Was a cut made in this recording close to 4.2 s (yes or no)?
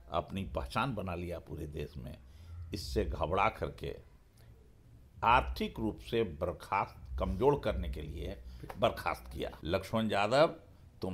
no